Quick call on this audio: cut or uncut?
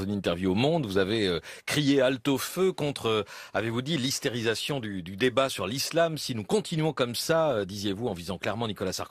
uncut